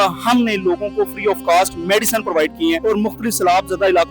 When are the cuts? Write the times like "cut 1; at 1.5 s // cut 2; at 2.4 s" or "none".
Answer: cut 1; at 2.8 s